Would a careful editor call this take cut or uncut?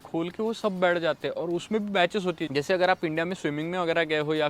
uncut